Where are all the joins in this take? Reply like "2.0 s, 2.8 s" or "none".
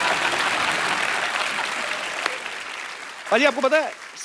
3.2 s